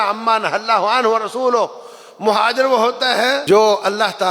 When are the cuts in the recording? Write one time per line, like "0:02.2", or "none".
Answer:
0:03.4